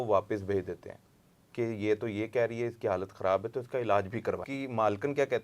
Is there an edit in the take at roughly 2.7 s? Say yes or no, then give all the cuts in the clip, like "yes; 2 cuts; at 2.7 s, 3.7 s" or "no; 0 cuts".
no; 1 cut; at 4.5 s